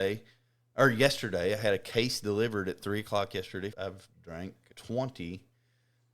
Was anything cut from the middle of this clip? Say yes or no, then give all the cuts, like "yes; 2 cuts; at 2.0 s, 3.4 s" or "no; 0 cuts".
yes; 1 cut; at 3.7 s